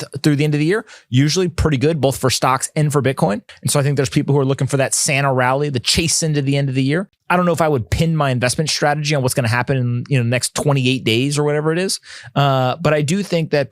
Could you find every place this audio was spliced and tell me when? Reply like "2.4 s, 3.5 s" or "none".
3.5 s, 7.2 s